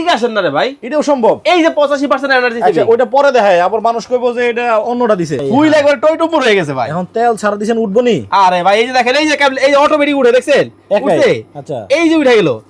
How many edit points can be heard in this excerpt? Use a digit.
1